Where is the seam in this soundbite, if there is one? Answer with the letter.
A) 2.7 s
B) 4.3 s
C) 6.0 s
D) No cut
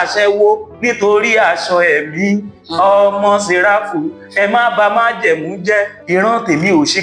C